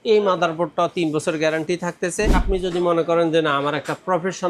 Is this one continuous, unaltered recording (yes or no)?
no